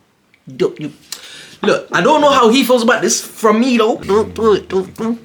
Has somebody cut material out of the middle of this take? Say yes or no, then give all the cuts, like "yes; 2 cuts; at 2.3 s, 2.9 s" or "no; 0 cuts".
yes; 1 cut; at 4.0 s